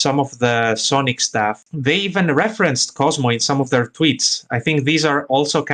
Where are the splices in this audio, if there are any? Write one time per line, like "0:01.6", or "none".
0:01.7